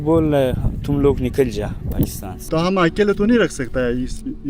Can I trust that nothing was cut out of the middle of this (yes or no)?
no